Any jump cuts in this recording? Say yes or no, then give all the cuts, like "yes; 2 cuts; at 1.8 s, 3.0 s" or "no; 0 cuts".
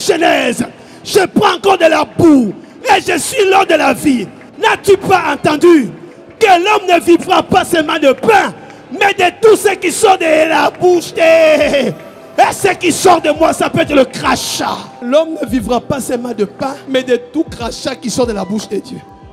yes; 1 cut; at 14.9 s